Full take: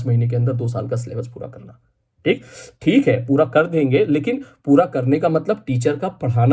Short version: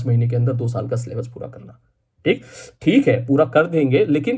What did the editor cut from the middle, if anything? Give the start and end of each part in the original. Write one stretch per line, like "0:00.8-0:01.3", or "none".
none